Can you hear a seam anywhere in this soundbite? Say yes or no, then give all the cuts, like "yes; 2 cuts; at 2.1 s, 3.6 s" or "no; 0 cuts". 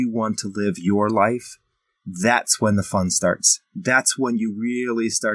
no; 0 cuts